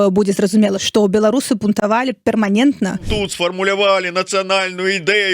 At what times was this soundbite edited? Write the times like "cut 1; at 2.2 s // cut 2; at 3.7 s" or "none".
cut 1; at 0.8 s // cut 2; at 3.1 s